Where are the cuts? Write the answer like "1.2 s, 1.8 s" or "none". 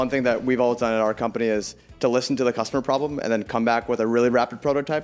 none